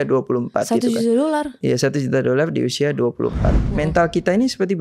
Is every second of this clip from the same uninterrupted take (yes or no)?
no